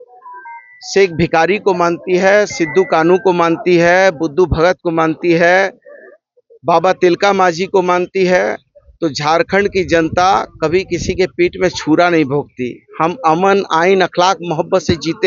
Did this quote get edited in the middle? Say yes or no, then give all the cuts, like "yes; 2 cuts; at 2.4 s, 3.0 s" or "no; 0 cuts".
no; 0 cuts